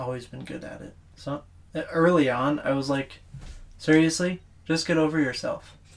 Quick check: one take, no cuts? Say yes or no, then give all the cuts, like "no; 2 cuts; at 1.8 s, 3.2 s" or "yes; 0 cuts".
yes; 0 cuts